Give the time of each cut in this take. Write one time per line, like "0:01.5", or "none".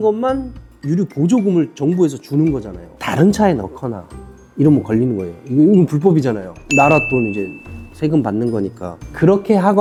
none